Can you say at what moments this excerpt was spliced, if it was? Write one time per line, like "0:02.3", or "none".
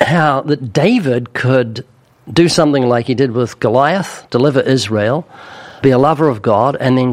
0:05.8

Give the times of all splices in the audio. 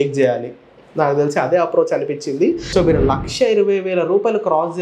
0:02.6

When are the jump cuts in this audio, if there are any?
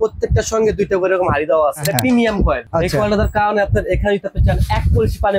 0:01.8
0:02.6

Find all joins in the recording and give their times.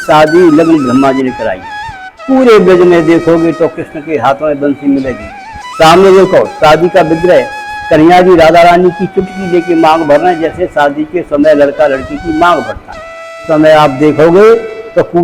0:13.4

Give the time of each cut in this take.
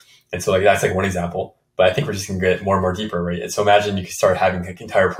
none

